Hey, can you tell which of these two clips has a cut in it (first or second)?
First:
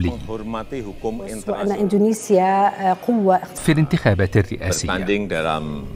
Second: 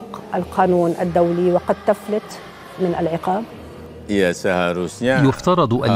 first